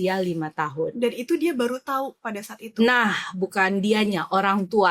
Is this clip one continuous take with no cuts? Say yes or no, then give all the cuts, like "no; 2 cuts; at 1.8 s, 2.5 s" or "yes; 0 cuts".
yes; 0 cuts